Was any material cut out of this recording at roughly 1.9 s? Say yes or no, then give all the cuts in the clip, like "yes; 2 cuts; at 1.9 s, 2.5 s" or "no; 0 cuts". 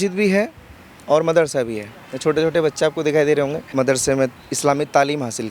no; 1 cut; at 3.6 s